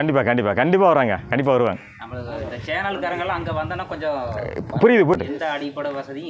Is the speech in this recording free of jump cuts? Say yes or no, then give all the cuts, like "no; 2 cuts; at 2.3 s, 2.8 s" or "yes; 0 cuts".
no; 1 cut; at 5.1 s